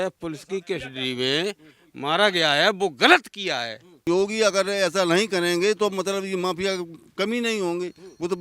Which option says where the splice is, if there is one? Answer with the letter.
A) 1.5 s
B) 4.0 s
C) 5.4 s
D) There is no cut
B